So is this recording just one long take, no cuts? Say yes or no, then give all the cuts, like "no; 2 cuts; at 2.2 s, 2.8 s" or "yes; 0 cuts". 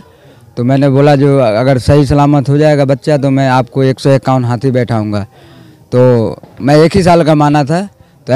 yes; 0 cuts